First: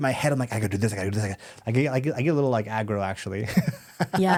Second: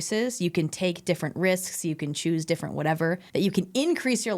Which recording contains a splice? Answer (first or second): second